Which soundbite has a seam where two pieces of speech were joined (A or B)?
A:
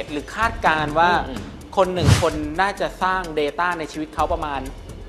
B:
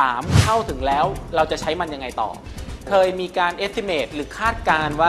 B